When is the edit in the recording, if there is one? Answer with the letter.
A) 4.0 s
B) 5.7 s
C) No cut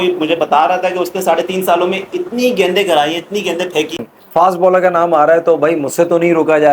A